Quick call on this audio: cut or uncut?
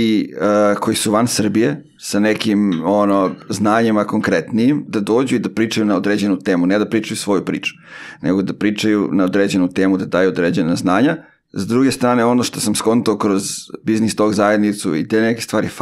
uncut